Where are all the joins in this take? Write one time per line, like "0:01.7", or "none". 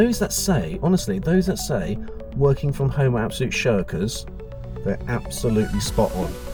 none